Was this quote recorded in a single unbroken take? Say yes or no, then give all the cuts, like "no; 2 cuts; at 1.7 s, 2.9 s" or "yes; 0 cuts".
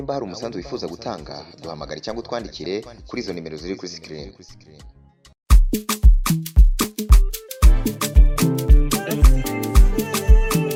yes; 0 cuts